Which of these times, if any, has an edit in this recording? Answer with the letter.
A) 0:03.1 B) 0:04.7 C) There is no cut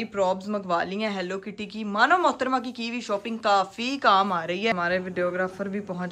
B